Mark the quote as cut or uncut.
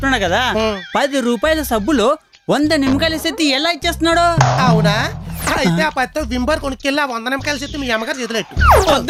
uncut